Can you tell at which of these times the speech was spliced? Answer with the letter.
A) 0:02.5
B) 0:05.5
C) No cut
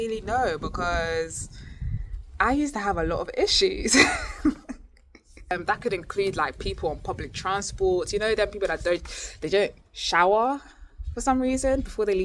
B